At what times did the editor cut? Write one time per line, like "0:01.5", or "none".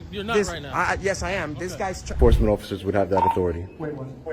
0:02.2